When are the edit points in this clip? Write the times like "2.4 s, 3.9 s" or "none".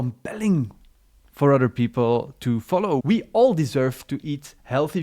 3.0 s